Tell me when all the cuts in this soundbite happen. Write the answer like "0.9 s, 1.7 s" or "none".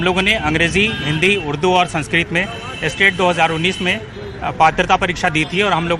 none